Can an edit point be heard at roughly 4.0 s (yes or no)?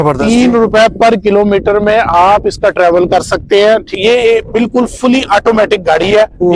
yes